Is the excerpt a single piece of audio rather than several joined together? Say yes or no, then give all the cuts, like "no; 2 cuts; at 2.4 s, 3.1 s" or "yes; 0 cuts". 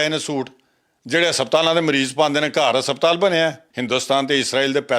no; 1 cut; at 3.7 s